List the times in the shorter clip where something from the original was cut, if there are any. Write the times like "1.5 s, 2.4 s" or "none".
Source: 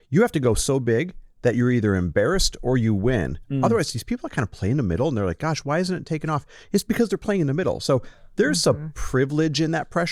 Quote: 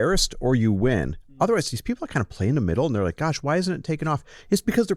none